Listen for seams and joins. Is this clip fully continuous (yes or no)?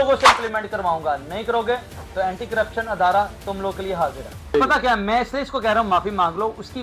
no